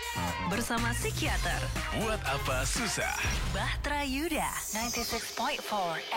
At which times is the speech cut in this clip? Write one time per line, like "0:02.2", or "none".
none